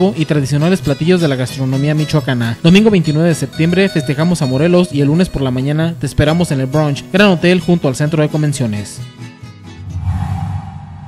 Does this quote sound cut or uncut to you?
uncut